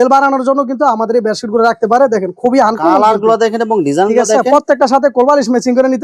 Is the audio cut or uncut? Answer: uncut